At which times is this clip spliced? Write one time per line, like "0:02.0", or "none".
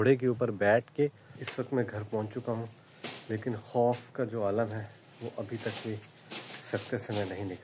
0:01.3